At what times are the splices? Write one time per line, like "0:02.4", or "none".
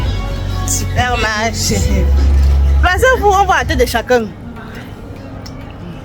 none